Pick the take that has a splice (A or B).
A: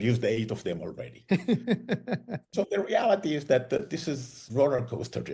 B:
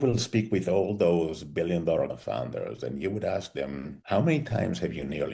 B